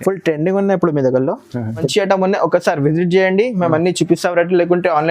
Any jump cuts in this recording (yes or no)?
yes